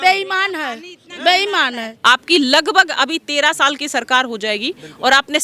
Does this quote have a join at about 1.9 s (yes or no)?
yes